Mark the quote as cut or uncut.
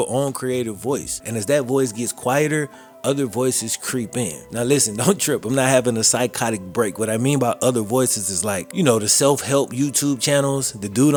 uncut